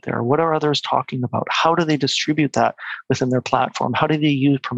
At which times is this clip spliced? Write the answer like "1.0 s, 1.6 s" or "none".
none